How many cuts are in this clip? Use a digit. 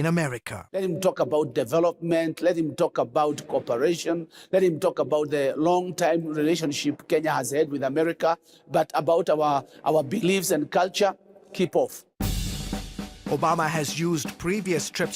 1